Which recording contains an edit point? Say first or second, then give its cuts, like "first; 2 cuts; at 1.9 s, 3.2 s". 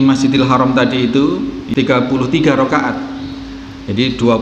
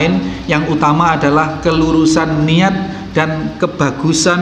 first; 1 cut; at 1.6 s